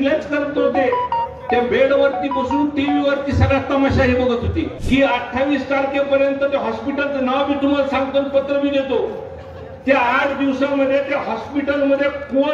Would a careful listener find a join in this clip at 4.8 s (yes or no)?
yes